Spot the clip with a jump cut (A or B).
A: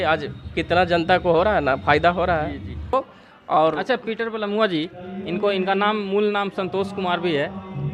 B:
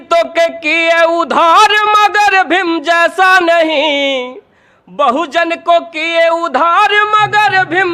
A